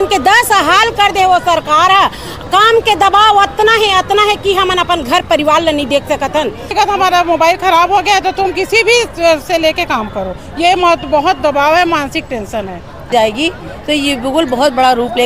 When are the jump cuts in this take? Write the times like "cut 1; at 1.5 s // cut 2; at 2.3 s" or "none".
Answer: cut 1; at 6.7 s // cut 2; at 13.1 s